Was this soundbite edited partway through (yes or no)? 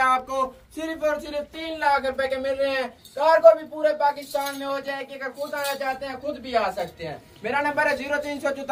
no